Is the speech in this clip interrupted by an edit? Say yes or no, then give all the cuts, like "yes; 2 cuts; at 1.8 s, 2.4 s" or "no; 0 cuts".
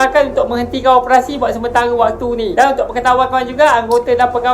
no; 0 cuts